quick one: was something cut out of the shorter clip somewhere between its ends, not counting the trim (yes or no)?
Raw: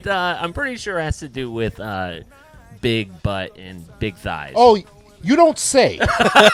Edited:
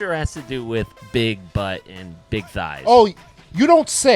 yes